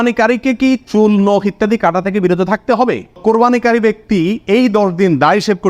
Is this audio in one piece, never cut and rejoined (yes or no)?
no